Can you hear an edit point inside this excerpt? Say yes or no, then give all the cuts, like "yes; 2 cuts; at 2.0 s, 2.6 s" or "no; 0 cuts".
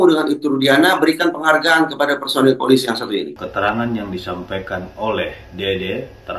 yes; 1 cut; at 3.4 s